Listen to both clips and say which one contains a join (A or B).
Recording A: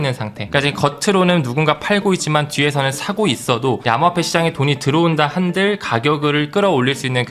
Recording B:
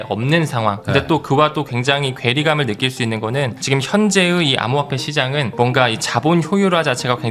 B